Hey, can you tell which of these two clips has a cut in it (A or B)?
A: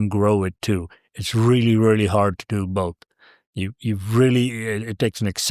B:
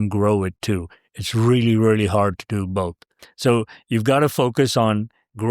B